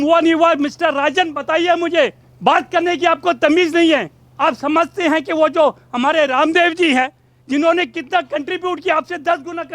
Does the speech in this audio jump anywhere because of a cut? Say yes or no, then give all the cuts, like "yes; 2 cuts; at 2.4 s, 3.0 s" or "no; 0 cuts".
yes; 2 cuts; at 2.3 s, 4.2 s